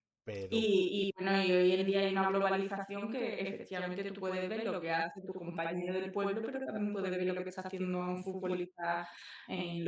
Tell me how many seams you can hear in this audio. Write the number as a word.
zero